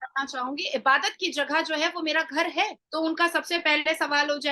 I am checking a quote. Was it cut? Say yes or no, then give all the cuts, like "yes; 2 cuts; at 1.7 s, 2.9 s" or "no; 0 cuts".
yes; 1 cut; at 2.8 s